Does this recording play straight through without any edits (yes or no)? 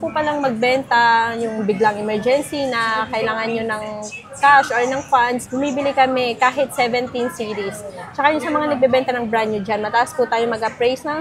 yes